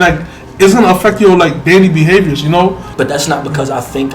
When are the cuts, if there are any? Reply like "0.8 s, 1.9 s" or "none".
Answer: 2.8 s